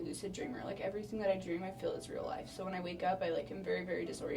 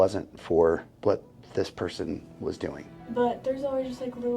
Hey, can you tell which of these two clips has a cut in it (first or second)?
second